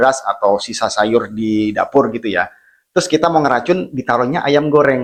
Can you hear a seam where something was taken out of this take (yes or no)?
no